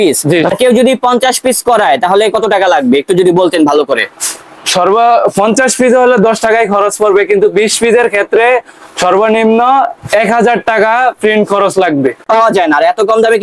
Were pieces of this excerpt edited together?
yes; 1 cut; at 12.3 s

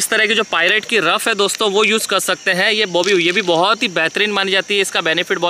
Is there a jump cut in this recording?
no; 0 cuts

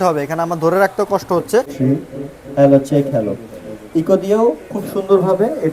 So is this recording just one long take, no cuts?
no; 1 cut; at 1.7 s

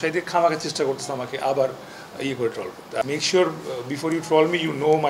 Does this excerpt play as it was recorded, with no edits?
no; 1 cut; at 3.0 s

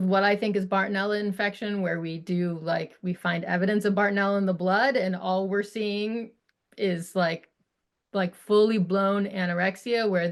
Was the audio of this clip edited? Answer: no; 0 cuts

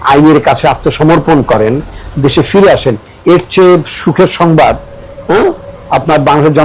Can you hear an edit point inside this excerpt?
no; 0 cuts

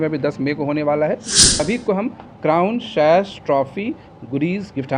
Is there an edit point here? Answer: yes; 1 cut; at 1.6 s

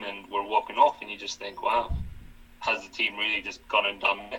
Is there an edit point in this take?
yes; 2 cuts; at 2.5 s, 3.5 s

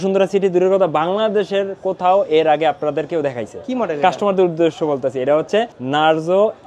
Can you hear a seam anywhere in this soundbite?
yes; 1 cut; at 5.8 s

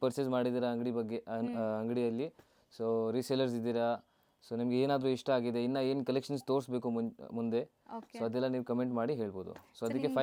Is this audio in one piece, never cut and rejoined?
yes; 0 cuts

